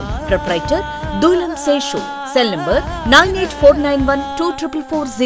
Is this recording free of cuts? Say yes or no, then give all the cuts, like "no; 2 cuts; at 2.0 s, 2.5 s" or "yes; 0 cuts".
yes; 0 cuts